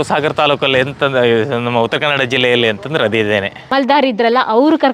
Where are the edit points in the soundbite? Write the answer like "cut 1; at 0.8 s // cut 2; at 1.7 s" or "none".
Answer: cut 1; at 3.7 s

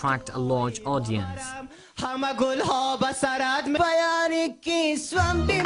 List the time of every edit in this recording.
cut 1; at 1.8 s

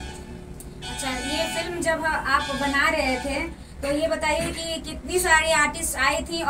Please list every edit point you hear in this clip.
none

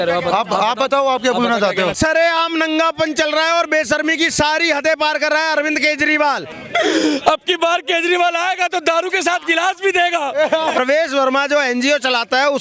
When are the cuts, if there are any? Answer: cut 1; at 1.9 s // cut 2; at 6.5 s // cut 3; at 10.8 s

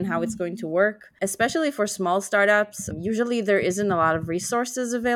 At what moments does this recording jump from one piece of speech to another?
cut 1; at 1.1 s // cut 2; at 2.8 s

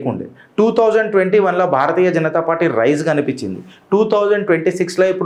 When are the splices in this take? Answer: none

